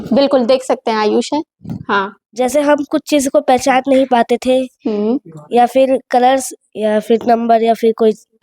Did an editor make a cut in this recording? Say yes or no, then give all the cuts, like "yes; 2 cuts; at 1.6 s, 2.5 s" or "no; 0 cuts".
yes; 1 cut; at 2.2 s